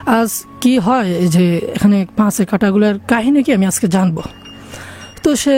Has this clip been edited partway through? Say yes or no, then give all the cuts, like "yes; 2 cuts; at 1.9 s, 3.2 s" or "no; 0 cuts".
no; 0 cuts